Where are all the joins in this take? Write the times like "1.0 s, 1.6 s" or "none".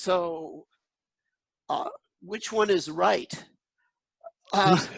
none